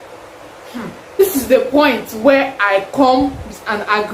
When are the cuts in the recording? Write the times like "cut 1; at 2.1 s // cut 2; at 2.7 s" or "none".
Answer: cut 1; at 1.2 s